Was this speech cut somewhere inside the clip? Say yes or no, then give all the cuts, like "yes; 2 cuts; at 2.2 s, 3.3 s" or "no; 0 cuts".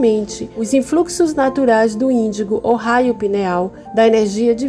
yes; 1 cut; at 3.8 s